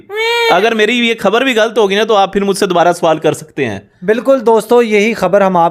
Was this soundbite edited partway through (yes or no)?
no